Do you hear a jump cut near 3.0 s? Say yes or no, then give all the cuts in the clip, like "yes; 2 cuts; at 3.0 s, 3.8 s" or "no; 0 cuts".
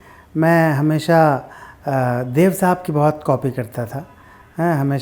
no; 0 cuts